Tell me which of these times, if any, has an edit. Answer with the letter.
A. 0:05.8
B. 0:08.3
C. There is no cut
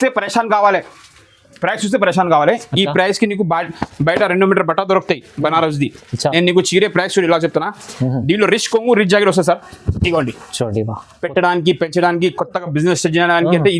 C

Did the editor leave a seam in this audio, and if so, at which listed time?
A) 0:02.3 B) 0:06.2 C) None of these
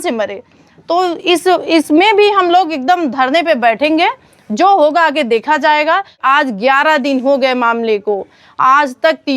B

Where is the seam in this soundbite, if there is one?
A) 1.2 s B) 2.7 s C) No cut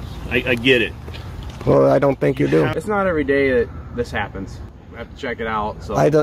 B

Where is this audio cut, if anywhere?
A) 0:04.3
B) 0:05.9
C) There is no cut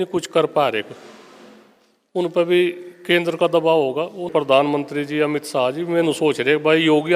A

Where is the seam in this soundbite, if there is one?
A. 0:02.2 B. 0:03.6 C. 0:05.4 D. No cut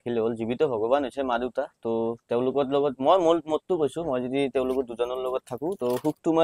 D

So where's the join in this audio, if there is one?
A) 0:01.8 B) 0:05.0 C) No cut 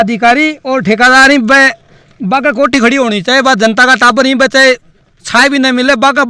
C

